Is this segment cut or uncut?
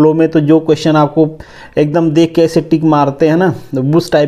uncut